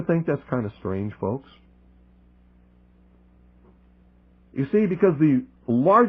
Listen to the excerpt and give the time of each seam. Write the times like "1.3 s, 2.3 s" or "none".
none